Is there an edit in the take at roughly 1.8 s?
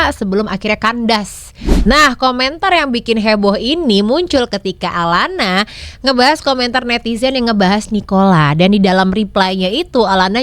yes; 1 cut; at 1.8 s

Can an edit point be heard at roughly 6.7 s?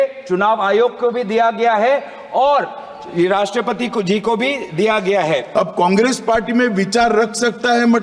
no; 1 cut; at 5.5 s

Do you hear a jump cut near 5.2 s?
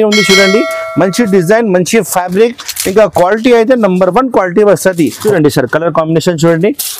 yes; 1 cut; at 5.2 s

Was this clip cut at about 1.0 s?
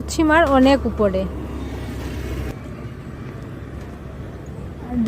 no; 1 cut; at 2.4 s

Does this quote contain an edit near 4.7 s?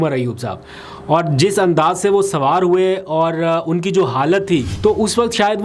yes; 1 cut; at 4.7 s

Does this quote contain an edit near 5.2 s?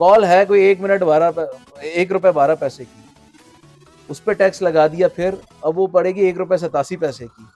no; 0 cuts

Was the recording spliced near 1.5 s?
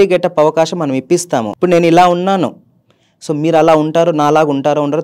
yes; 1 cut; at 1.5 s

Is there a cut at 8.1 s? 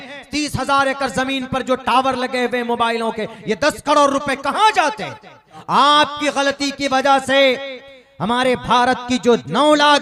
no; 1 cut; at 5.5 s

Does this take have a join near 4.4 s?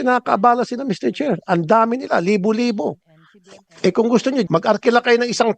yes; 1 cut; at 4.4 s

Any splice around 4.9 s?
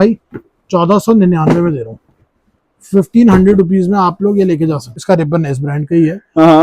yes; 1 cut; at 4.9 s

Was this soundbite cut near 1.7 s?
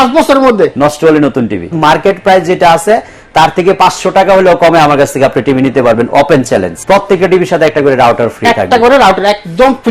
yes; 2 cuts; at 1.7 s, 6.8 s

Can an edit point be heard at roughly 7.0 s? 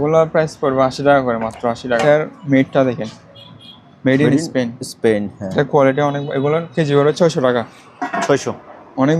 no; 1 cut; at 2.0 s

